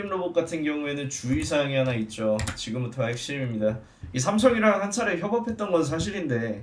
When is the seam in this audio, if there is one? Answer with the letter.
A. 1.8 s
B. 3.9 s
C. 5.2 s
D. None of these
B